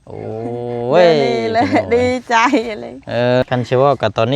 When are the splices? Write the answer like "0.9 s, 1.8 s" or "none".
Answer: 3.4 s